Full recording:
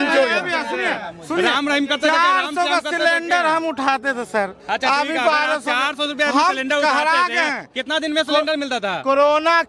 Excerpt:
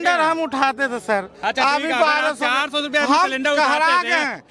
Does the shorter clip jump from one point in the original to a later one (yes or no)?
no